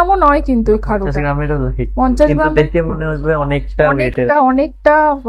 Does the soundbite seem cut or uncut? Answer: uncut